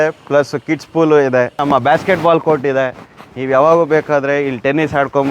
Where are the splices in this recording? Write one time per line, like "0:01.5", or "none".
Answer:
0:01.5